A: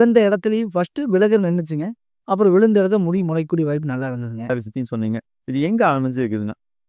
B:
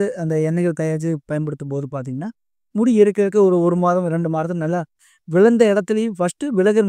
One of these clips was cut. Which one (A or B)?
A